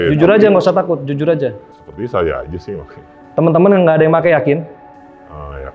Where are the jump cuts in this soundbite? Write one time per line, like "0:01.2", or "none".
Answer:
none